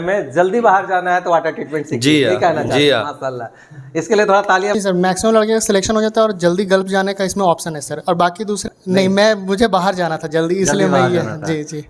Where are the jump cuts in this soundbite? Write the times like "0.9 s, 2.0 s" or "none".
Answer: 4.7 s, 8.6 s